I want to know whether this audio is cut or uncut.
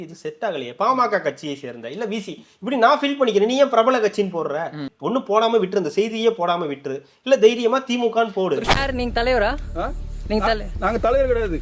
cut